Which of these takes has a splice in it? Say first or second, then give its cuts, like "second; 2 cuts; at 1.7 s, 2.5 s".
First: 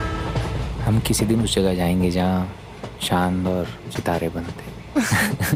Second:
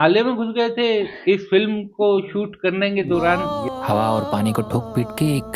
second; 1 cut; at 3.5 s